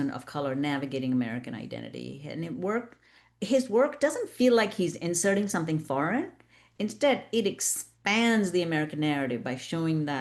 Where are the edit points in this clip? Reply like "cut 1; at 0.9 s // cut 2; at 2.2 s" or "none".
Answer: none